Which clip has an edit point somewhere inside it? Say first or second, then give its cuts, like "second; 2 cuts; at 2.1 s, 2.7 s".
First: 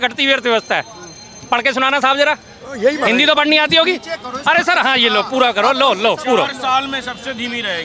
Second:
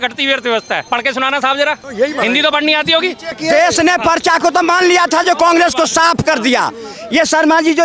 second; 3 cuts; at 0.8 s, 1.9 s, 3.4 s